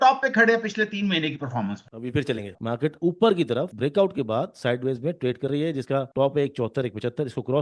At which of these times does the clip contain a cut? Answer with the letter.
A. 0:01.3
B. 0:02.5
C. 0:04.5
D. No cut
B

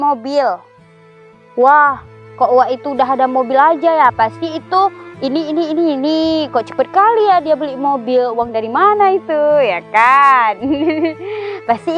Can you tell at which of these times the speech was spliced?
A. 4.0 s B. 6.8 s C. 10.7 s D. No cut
D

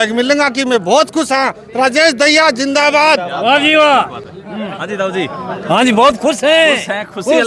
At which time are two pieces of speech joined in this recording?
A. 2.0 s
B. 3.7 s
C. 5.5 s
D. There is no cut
D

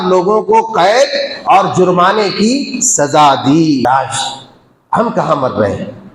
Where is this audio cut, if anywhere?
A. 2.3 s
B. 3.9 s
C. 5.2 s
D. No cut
B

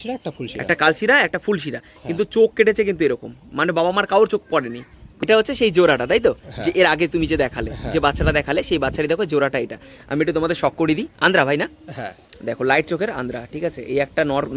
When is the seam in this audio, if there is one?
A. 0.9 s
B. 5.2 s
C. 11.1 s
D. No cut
B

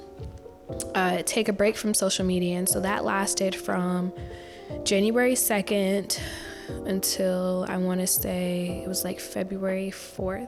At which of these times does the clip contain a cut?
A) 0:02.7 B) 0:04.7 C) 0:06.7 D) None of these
D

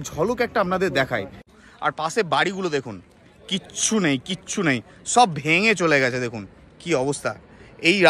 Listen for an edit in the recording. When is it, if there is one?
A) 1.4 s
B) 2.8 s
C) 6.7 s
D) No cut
A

